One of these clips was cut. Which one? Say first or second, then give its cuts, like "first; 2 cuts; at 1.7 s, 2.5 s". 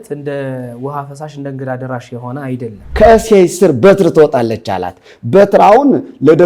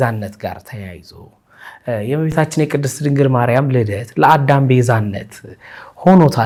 first; 1 cut; at 2.8 s